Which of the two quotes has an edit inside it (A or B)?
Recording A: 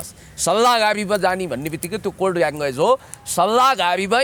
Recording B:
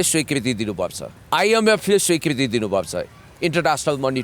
B